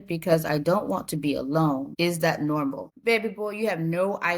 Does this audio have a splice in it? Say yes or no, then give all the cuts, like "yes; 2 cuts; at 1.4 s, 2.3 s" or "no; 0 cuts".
yes; 2 cuts; at 1.9 s, 2.9 s